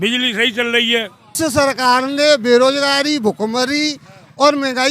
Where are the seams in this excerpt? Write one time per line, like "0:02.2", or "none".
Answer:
0:01.3